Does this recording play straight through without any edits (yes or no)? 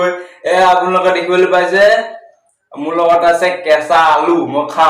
yes